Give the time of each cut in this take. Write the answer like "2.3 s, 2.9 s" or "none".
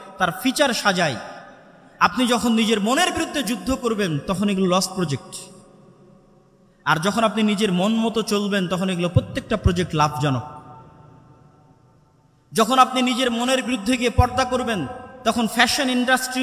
none